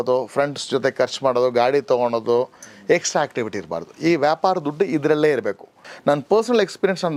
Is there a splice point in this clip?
yes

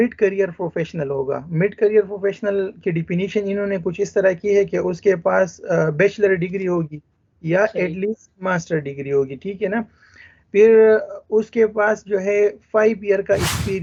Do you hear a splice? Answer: no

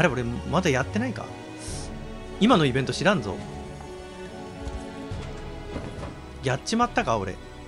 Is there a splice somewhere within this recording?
no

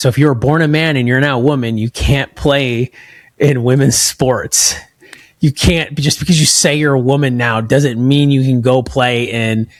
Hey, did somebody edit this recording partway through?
no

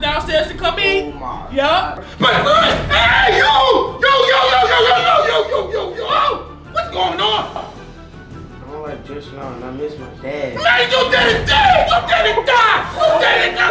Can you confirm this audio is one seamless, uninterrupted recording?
no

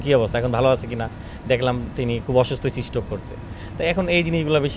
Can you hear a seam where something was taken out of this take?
no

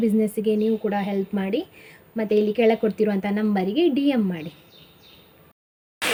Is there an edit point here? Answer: no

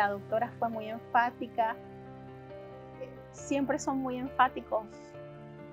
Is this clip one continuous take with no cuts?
yes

